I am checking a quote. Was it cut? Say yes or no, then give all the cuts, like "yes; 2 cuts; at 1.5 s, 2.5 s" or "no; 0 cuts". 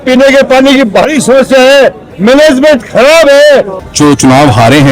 yes; 1 cut; at 3.7 s